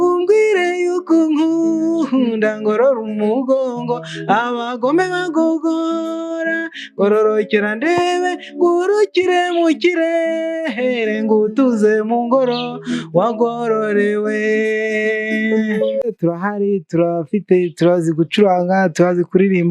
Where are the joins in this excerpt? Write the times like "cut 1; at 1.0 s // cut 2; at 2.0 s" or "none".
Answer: cut 1; at 16.0 s